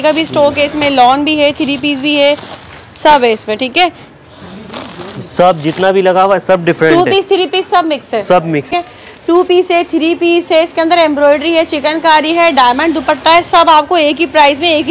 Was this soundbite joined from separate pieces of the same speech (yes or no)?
yes